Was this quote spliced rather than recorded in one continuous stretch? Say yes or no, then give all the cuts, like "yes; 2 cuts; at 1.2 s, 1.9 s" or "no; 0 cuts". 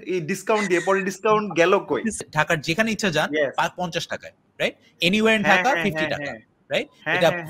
yes; 1 cut; at 2.2 s